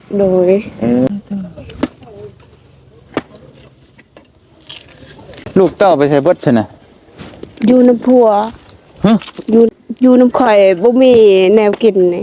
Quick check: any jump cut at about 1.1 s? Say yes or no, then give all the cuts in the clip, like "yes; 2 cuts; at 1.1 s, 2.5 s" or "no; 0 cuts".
yes; 2 cuts; at 1.1 s, 9.7 s